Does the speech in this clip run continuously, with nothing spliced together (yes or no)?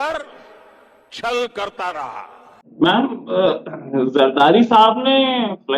no